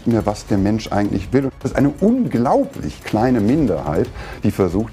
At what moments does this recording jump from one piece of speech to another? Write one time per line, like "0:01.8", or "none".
0:01.5